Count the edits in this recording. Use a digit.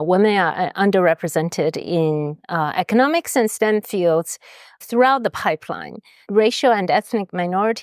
1